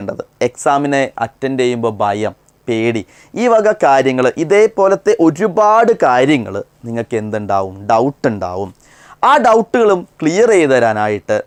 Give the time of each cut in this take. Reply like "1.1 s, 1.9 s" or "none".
none

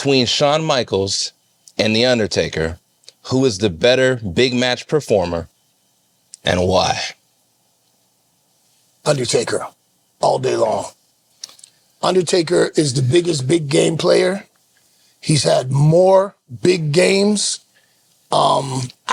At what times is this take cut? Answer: none

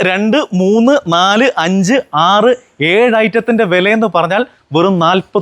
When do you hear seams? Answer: none

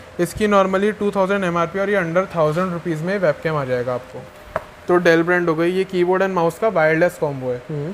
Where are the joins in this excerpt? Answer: 4.3 s

